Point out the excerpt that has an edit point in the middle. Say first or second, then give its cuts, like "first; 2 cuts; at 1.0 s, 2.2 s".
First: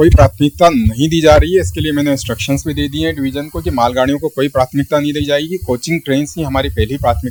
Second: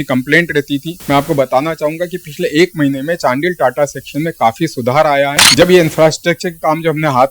second; 2 cuts; at 0.9 s, 5.6 s